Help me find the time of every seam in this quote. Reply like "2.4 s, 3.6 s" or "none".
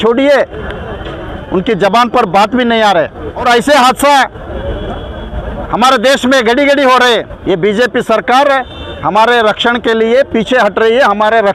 3.4 s, 7.3 s